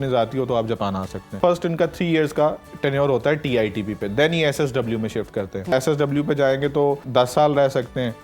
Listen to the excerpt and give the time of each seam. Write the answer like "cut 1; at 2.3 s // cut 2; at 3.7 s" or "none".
cut 1; at 1.4 s // cut 2; at 5.7 s // cut 3; at 7.0 s